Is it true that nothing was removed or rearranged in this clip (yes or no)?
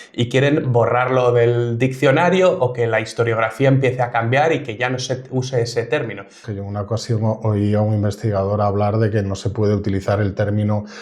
no